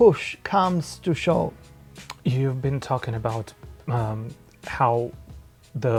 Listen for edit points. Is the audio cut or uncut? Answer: uncut